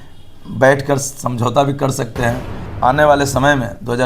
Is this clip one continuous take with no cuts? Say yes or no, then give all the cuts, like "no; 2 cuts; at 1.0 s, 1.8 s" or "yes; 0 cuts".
no; 1 cut; at 2.7 s